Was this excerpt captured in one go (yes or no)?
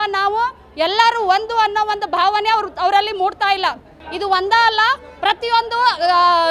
yes